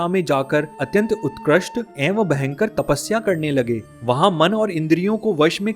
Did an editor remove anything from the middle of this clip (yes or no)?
no